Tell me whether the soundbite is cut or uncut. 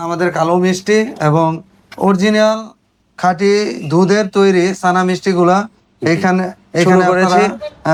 uncut